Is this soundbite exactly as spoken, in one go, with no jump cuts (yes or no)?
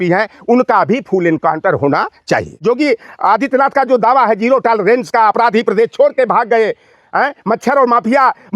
no